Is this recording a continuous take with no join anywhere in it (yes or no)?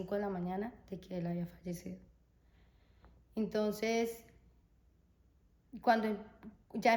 yes